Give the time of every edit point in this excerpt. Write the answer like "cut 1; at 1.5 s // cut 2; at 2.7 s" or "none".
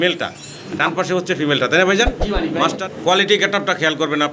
cut 1; at 2.8 s